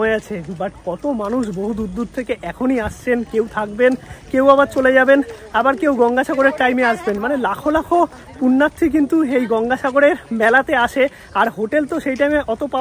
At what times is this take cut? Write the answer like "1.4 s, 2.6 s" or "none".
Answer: none